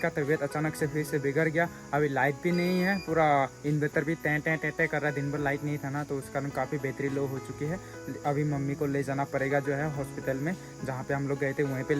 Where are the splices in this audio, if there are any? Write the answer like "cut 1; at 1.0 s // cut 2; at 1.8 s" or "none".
none